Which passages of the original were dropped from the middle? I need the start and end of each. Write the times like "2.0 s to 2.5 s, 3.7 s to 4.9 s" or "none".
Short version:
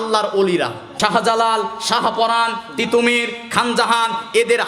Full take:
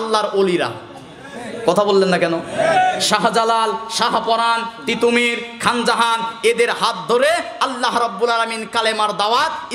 0.9 s to 3.0 s